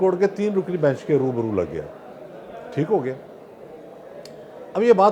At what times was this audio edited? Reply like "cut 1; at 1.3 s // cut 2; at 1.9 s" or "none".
none